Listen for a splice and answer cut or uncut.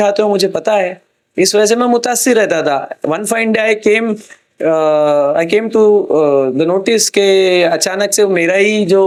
uncut